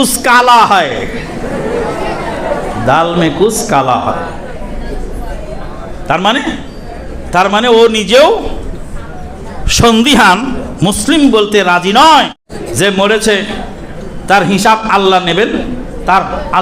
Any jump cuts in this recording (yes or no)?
yes